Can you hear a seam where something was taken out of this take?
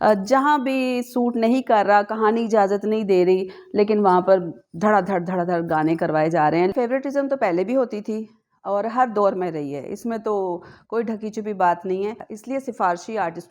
yes; 2 cuts; at 6.7 s, 12.3 s

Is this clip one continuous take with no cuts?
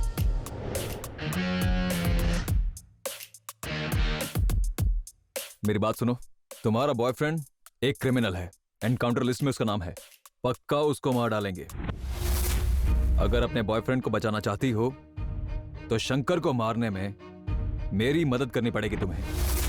yes; 0 cuts

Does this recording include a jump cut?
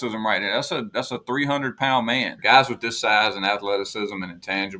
yes; 1 cut; at 2.4 s

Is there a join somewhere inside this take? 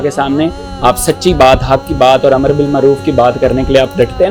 no; 0 cuts

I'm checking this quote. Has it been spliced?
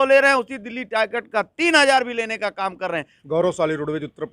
yes; 1 cut; at 3.1 s

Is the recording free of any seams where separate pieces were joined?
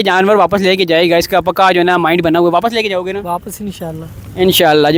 yes; 0 cuts

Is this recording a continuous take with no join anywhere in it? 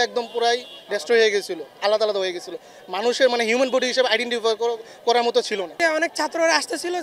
no; 1 cut; at 5.8 s

